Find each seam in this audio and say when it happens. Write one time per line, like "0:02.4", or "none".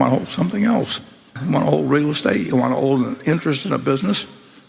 0:01.4